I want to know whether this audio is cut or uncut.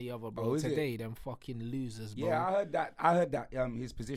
uncut